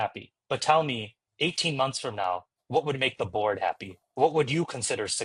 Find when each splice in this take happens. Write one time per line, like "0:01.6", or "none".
none